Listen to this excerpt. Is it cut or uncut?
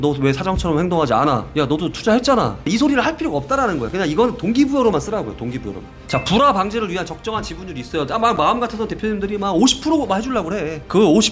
cut